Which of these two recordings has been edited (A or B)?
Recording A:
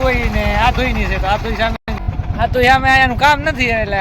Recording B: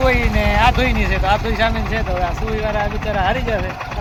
A